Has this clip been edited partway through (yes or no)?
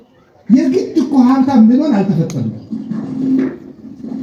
no